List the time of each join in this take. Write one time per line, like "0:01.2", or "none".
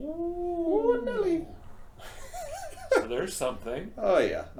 none

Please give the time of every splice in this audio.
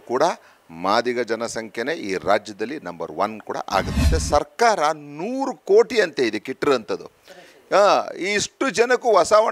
0:04.1

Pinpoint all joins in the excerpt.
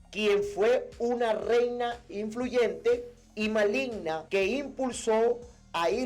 0:04.2

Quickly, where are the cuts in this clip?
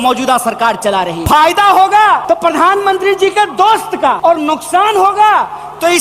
0:01.2
0:02.2
0:04.2

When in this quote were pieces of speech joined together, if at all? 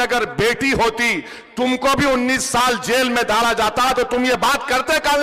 none

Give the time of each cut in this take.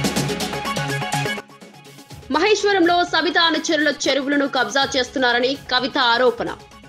0:01.3

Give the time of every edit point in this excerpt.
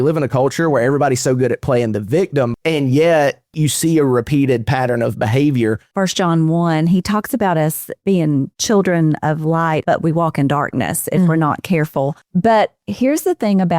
0:02.5
0:05.9
0:08.5
0:09.8
0:12.2

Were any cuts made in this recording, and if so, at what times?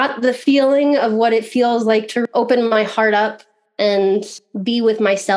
0:02.3

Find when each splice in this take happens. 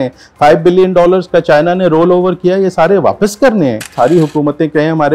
0:03.9

